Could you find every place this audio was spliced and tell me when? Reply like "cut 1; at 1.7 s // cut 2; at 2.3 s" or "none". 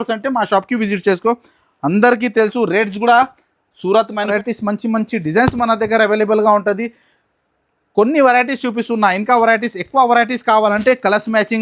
cut 1; at 4.3 s